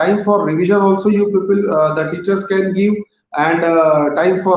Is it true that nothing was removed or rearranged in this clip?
yes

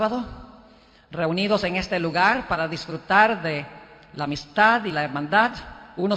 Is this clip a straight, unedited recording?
no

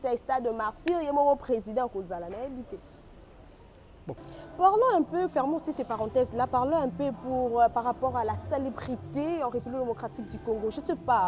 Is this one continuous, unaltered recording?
no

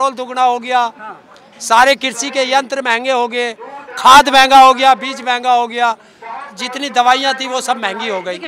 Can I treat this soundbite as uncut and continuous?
yes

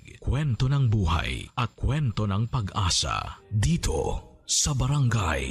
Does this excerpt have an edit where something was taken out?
no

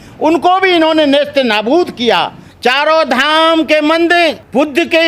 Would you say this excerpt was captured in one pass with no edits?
no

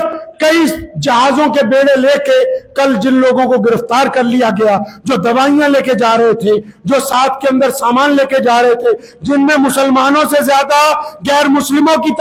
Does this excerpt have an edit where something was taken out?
no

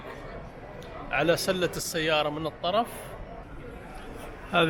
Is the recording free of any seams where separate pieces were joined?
no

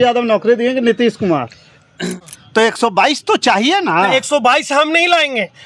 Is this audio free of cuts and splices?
no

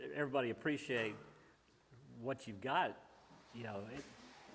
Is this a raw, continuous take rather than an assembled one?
yes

